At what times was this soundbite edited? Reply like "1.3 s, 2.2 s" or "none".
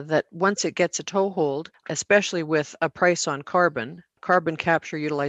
1.9 s, 4.2 s